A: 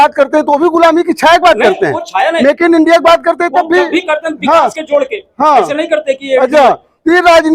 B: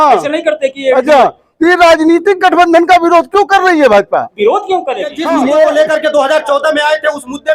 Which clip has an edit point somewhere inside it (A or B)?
B